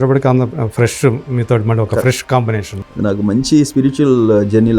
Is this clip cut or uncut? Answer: cut